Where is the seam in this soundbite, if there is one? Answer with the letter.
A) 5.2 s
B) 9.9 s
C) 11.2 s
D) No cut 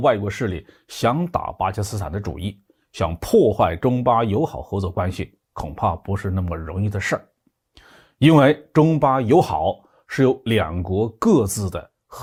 D